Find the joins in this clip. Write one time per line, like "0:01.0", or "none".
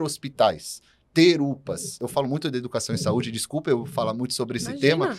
0:01.9